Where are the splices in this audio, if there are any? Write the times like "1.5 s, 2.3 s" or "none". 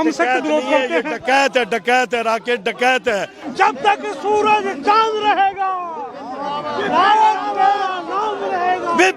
3.4 s